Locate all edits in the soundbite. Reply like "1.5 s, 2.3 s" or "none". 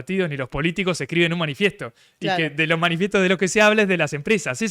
none